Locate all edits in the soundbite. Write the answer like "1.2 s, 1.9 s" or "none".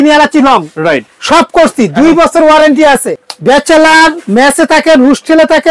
3.0 s